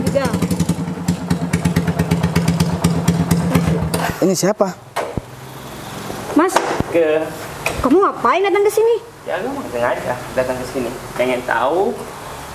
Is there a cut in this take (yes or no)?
no